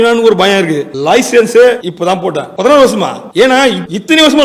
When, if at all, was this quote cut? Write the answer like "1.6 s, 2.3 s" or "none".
0.8 s, 2.1 s